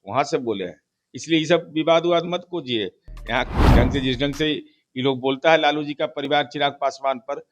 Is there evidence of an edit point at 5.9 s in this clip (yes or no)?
no